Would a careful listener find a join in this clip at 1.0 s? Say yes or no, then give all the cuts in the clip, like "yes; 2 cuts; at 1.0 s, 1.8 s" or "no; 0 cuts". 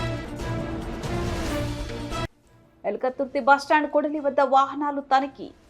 no; 1 cut; at 2.4 s